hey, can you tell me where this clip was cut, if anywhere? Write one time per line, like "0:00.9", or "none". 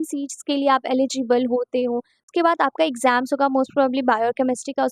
0:02.3